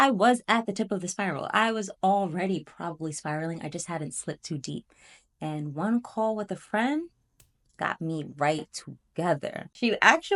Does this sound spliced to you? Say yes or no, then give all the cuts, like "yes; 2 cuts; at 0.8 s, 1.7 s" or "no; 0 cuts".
no; 0 cuts